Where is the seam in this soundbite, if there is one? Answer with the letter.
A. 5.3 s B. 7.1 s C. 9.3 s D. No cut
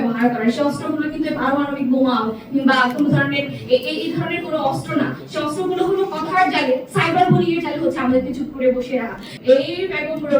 C